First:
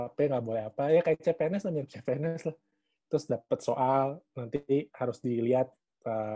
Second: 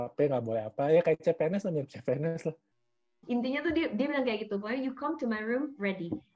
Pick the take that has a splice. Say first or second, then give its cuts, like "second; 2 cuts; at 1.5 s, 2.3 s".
second; 1 cut; at 3.0 s